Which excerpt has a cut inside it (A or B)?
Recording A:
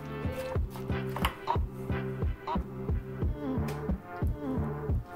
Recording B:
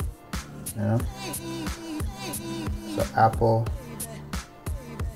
B